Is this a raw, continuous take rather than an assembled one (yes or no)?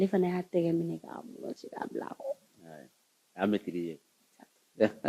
yes